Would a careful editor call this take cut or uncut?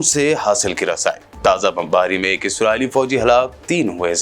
uncut